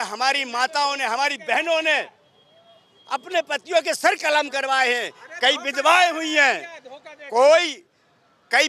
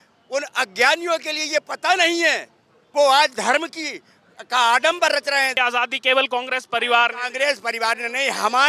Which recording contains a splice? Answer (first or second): second